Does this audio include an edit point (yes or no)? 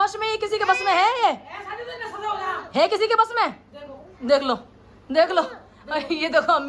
no